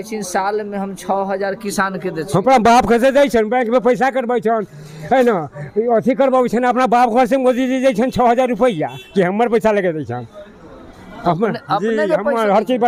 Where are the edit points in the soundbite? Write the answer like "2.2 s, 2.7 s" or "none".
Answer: none